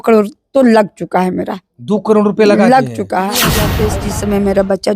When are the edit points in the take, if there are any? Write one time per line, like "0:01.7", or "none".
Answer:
0:03.7